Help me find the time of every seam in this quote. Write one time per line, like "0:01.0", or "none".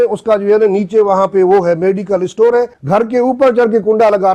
0:02.8